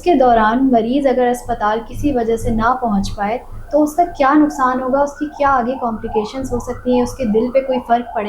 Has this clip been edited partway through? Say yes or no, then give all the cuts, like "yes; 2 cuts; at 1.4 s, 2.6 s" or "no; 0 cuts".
no; 0 cuts